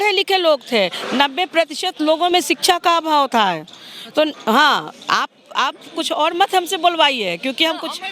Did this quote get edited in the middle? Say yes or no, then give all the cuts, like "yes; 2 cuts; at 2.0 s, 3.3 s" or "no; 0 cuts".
no; 0 cuts